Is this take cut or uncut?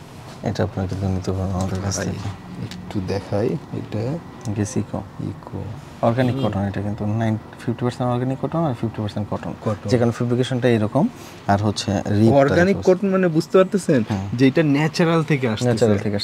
uncut